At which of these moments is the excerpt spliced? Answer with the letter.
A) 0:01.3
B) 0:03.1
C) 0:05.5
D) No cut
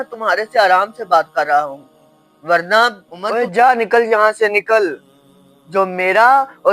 B